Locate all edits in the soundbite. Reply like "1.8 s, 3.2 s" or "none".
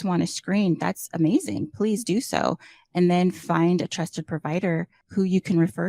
5.0 s